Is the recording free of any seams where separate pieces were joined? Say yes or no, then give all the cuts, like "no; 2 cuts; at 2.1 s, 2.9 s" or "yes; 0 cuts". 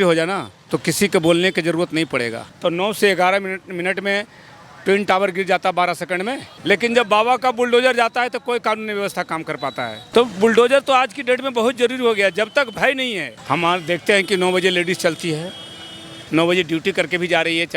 no; 4 cuts; at 2.4 s, 6.5 s, 10.0 s, 13.4 s